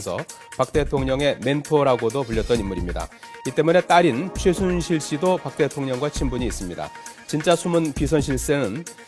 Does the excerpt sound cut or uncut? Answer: uncut